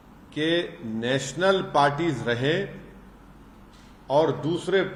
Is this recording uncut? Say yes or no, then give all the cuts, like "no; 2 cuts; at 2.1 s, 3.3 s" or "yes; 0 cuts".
yes; 0 cuts